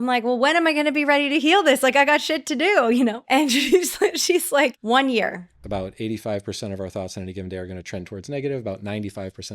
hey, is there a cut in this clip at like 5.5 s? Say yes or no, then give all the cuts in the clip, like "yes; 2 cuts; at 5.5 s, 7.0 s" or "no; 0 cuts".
yes; 3 cuts; at 3.2 s, 4.8 s, 5.5 s